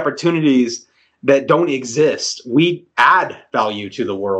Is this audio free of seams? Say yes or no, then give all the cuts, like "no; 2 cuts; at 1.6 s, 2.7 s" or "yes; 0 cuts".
yes; 0 cuts